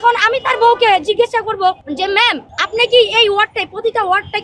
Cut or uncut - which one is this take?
cut